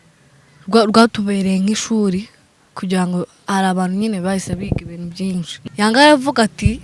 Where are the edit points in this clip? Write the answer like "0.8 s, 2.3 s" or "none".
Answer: 5.6 s